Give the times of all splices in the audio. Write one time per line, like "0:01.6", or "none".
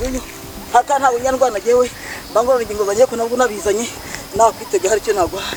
none

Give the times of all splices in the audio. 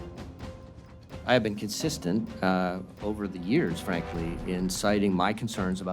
0:01.2

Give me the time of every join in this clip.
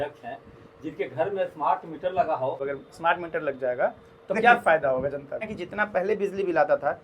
0:02.6
0:05.5

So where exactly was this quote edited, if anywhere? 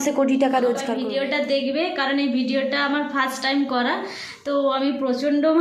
0:00.9

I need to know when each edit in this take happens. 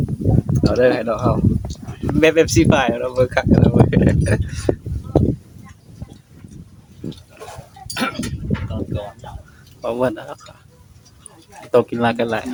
none

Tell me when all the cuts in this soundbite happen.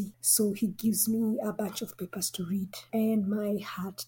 none

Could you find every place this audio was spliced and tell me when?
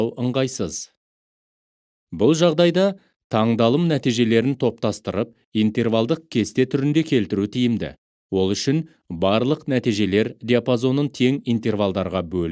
0:07.4

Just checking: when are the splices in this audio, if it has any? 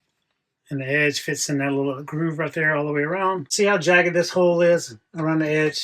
0:03.5

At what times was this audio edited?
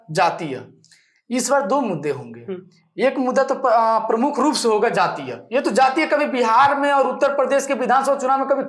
none

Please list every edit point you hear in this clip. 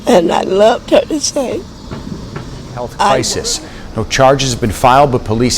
0:03.3

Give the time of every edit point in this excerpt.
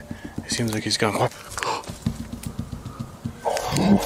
none

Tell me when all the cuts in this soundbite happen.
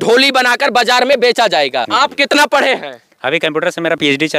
0:01.9

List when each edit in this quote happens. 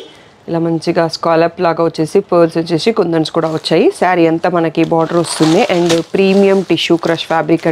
none

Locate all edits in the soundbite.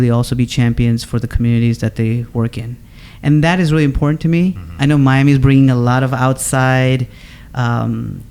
none

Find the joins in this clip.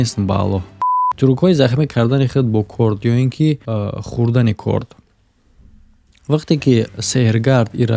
0:01.0

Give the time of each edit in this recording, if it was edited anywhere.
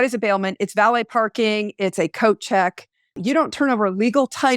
0:03.2

